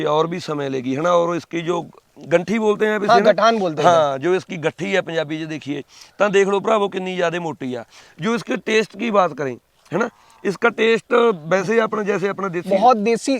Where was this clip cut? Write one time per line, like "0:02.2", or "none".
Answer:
none